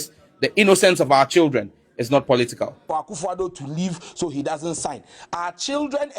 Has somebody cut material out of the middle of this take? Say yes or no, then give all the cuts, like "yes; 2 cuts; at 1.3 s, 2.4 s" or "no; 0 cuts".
yes; 1 cut; at 2.8 s